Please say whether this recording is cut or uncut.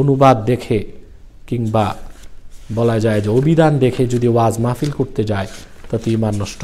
uncut